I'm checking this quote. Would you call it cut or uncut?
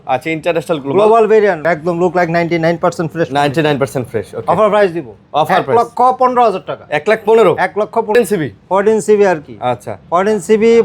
cut